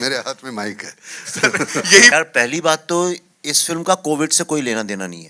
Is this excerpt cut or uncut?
cut